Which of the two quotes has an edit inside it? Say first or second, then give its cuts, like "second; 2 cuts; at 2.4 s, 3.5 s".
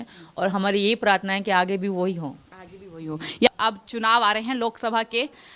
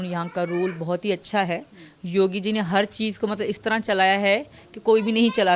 first; 1 cut; at 3.5 s